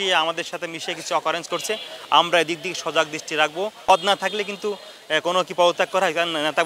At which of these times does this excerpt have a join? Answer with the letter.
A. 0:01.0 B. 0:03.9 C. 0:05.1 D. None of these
B